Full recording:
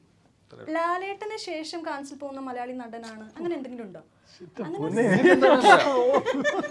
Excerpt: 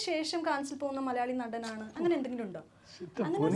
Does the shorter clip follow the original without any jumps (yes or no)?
yes